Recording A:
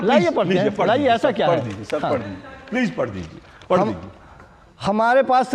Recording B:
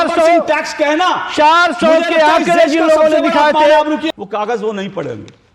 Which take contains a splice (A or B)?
B